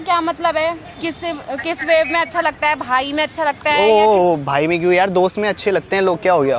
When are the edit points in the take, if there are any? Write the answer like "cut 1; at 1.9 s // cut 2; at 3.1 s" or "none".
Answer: none